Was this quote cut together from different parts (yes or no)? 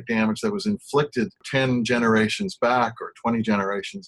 yes